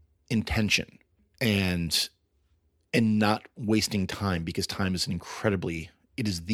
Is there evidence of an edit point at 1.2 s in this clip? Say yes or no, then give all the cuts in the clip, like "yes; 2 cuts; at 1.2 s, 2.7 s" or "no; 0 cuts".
yes; 1 cut; at 1.2 s